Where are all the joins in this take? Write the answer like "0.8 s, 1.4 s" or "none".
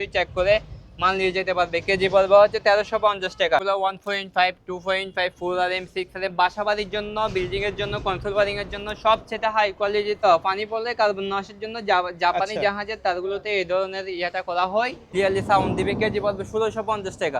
3.6 s, 10.2 s, 15.0 s